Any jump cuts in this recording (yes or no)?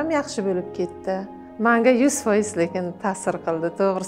yes